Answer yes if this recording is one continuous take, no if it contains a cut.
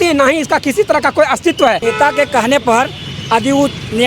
no